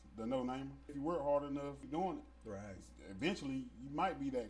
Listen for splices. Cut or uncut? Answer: cut